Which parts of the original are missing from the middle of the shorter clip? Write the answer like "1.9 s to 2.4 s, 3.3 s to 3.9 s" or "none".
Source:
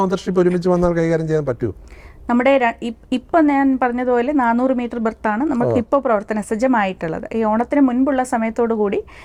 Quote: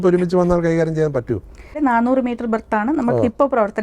2.1 s to 4.3 s

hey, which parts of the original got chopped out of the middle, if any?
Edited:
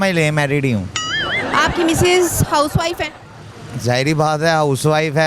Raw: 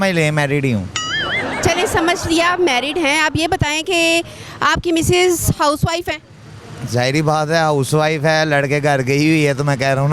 1.4 s to 4.5 s

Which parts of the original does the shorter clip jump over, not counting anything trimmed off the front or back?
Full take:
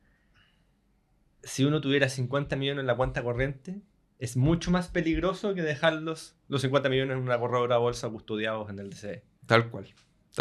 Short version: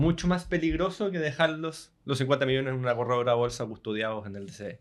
none

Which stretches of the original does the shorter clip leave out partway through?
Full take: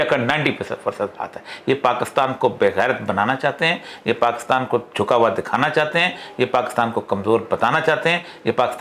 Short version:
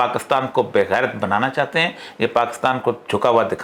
none

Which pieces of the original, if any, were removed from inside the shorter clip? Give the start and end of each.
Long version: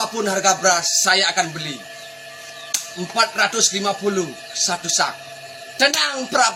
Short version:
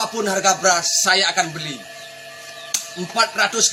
none

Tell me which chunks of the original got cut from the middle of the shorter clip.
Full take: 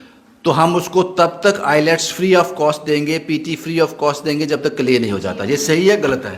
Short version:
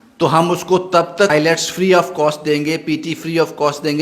1.5 s to 1.7 s

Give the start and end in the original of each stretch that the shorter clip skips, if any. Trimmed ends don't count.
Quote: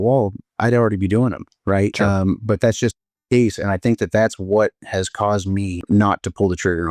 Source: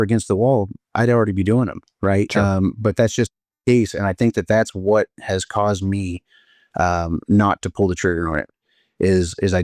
6.2 s to 7.2 s

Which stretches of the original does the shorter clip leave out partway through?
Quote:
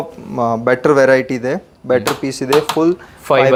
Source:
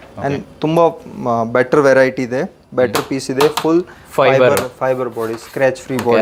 none

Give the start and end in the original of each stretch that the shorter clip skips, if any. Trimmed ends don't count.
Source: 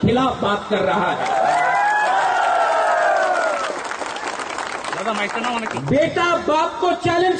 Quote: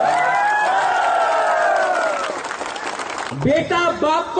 4.7 s to 5.8 s

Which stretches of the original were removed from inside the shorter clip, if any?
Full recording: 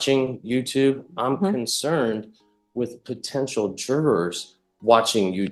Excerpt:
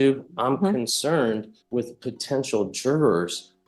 2.3 s to 2.6 s

